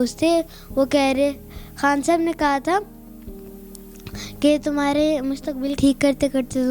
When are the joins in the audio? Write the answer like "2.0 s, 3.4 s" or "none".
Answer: 5.7 s